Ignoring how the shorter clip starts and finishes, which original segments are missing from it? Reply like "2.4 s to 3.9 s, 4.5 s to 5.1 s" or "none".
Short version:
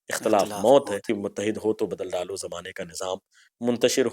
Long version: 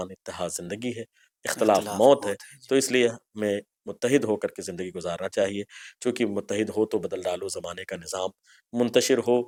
2.4 s to 6.2 s